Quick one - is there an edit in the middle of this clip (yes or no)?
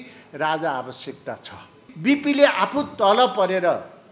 yes